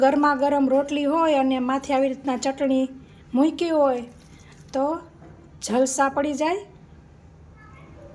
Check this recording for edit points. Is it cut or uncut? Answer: uncut